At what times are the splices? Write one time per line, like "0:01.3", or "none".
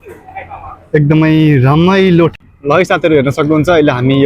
0:02.4